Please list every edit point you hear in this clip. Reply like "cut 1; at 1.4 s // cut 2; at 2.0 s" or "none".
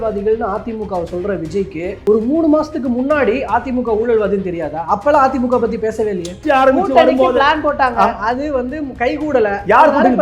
cut 1; at 2.0 s // cut 2; at 6.4 s